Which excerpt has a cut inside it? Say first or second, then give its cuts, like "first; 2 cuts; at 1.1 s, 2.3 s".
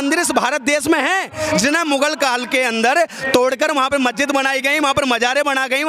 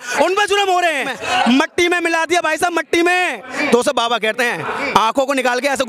second; 2 cuts; at 1.1 s, 3.5 s